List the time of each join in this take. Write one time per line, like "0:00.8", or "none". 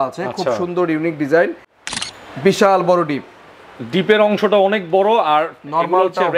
0:01.7